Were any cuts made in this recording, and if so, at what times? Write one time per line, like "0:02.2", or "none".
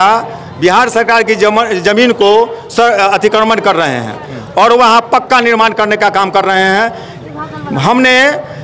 none